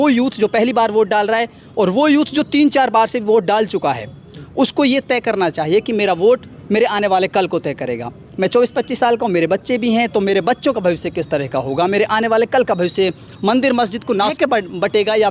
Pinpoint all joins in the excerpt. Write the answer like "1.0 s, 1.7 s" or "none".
14.3 s